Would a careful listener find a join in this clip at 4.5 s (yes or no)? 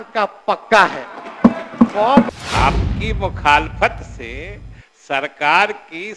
no